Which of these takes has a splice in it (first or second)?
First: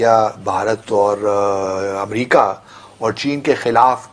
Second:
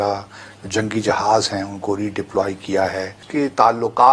second